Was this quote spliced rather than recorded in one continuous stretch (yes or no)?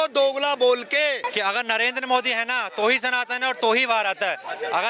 yes